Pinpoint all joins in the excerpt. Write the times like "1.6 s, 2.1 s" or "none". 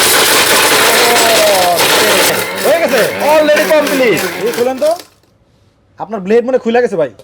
2.3 s